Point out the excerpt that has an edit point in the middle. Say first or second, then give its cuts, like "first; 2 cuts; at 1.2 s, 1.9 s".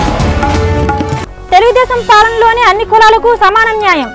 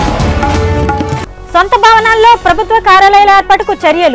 first; 1 cut; at 1.2 s